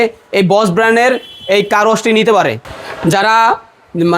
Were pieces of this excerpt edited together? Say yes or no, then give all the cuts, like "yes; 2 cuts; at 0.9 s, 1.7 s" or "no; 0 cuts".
yes; 1 cut; at 2.6 s